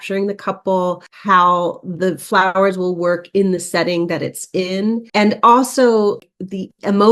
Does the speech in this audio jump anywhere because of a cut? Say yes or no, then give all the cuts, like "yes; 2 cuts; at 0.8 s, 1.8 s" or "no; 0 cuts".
no; 0 cuts